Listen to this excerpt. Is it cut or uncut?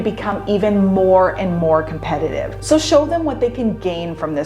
cut